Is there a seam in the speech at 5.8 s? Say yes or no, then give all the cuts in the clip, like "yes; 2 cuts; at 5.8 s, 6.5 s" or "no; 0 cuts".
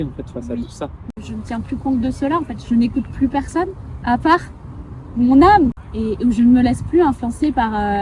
yes; 2 cuts; at 1.3 s, 5.8 s